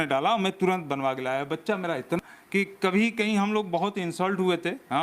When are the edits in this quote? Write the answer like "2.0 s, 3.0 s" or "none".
2.2 s

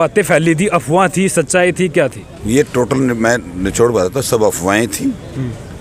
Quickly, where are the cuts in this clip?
none

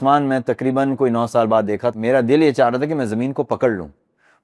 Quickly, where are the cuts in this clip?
1.9 s

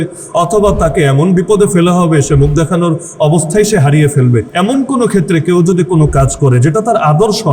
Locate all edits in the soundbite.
3.1 s, 4.5 s

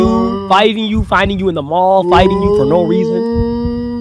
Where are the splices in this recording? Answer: none

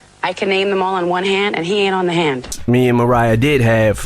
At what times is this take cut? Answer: 2.5 s

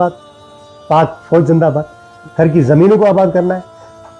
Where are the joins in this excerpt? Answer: 2.0 s

